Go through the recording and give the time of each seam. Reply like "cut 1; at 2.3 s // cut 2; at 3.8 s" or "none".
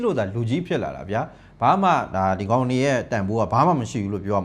none